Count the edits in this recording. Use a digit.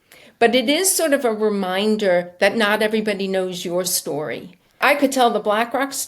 1